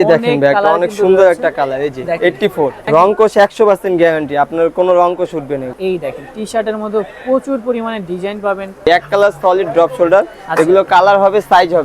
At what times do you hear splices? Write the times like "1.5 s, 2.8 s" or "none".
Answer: 2.8 s, 5.7 s, 8.8 s